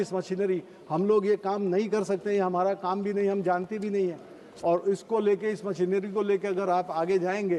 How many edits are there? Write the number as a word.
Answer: zero